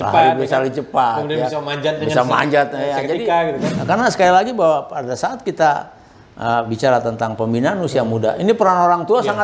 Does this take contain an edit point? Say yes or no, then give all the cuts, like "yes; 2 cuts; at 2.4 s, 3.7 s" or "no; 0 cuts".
yes; 1 cut; at 3.7 s